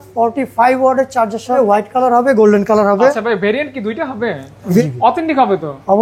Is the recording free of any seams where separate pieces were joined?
no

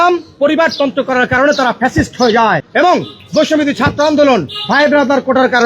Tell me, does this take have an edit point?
no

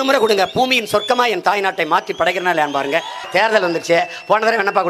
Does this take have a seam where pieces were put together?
yes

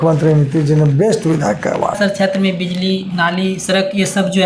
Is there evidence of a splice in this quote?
yes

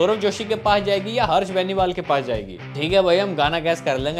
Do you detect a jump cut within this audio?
yes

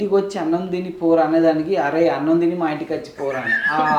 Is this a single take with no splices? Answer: yes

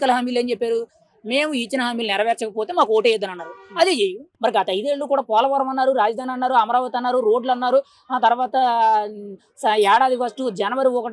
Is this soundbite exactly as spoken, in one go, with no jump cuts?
no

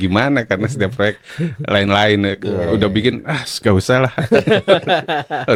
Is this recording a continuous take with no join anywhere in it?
yes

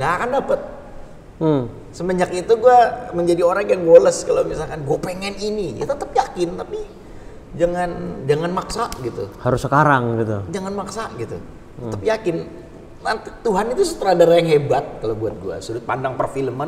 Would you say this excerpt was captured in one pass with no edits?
yes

